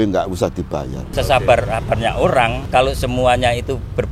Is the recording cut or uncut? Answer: cut